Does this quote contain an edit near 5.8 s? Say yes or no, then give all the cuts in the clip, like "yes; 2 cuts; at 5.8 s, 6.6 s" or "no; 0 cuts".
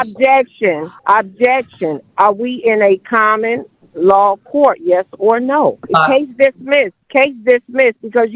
yes; 3 cuts; at 0.9 s, 5.8 s, 7.0 s